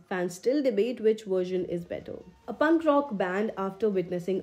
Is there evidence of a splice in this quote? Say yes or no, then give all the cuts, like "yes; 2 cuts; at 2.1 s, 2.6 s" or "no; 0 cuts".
no; 0 cuts